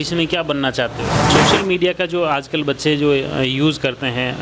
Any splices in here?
yes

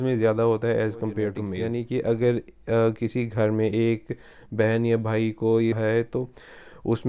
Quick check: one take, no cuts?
no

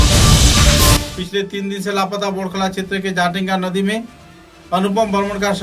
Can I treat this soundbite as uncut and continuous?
no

